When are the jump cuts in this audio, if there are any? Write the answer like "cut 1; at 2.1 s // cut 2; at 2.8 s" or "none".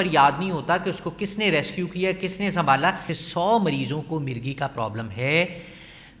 cut 1; at 3.1 s